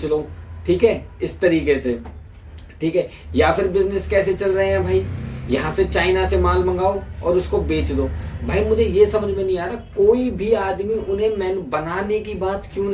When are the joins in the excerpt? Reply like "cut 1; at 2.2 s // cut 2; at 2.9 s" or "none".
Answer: none

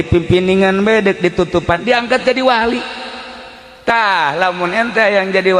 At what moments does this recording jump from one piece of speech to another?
none

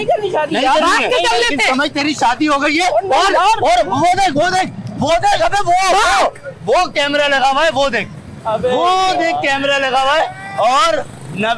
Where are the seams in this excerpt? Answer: none

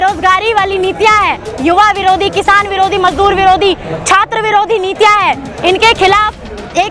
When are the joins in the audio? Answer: none

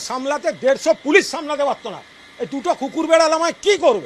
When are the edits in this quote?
none

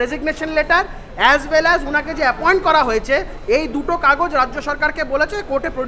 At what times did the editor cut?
none

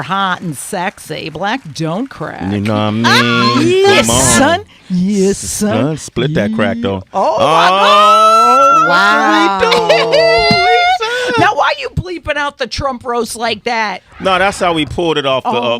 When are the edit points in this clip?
cut 1; at 10.2 s

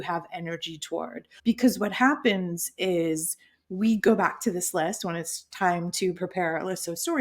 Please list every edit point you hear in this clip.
cut 1; at 1.2 s

